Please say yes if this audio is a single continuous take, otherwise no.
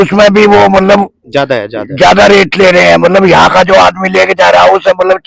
yes